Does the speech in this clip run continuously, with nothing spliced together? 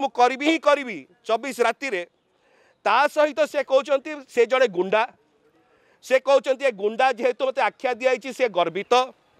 yes; 0 cuts

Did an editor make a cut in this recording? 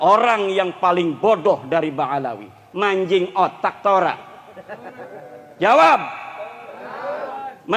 no; 0 cuts

